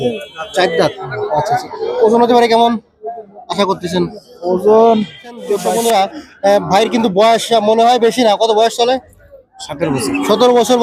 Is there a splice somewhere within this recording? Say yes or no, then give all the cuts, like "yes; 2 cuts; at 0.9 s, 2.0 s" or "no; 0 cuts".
yes; 1 cut; at 5.6 s